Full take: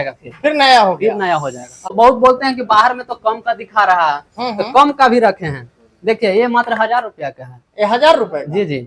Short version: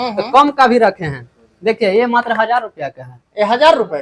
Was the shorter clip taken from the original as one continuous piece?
yes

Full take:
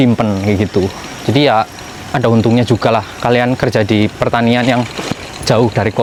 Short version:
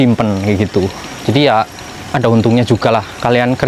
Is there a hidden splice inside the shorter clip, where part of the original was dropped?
no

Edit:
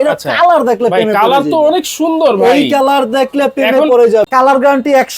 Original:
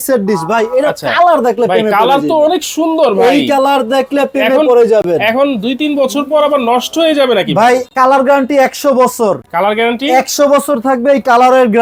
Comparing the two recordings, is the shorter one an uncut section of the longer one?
no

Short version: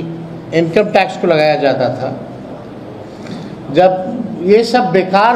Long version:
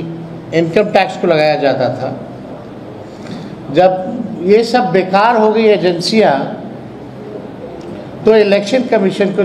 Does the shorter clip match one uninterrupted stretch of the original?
yes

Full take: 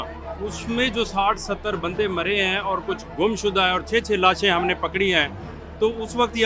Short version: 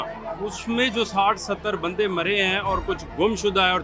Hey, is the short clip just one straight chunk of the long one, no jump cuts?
yes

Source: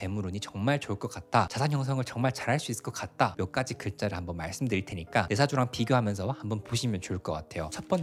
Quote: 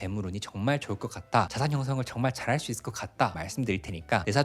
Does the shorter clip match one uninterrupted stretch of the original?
no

